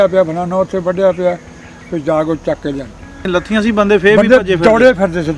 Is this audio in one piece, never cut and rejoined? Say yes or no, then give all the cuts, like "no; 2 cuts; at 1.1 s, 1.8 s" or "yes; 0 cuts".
no; 1 cut; at 3.3 s